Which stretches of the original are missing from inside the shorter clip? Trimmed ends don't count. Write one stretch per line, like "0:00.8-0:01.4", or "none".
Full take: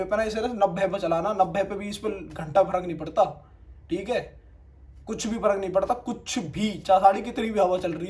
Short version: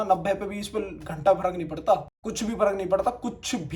0:03.5-0:05.0